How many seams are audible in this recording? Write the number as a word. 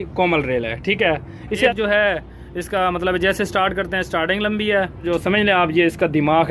two